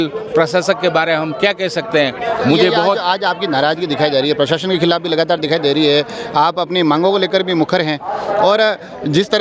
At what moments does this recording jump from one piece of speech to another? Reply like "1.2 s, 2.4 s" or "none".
none